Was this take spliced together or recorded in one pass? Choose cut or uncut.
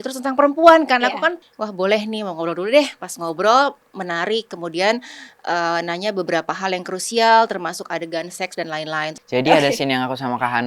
cut